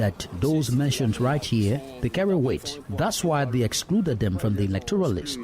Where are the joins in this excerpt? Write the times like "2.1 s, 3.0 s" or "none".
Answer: none